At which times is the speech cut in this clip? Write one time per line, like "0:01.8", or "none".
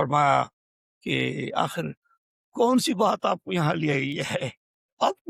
none